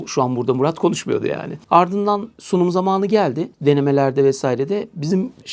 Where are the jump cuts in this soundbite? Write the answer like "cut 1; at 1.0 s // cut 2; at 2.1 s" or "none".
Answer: none